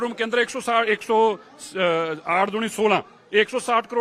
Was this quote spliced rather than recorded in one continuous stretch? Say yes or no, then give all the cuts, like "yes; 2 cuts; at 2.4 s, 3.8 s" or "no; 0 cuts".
no; 0 cuts